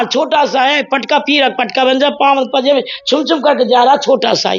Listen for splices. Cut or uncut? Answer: uncut